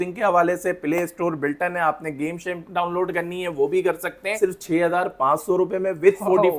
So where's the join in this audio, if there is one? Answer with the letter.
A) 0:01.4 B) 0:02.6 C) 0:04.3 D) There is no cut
C